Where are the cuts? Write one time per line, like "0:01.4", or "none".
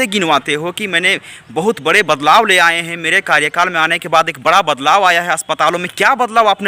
none